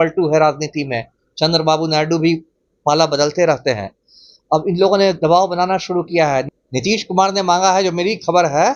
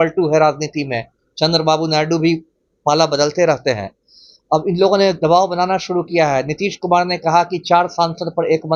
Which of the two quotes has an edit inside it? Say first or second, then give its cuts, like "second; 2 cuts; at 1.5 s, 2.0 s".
first; 1 cut; at 6.5 s